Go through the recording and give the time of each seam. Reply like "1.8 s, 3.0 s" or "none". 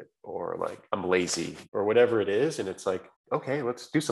0.8 s, 1.6 s, 3.1 s